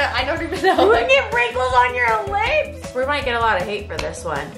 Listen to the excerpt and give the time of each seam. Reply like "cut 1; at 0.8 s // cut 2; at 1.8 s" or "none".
cut 1; at 2.8 s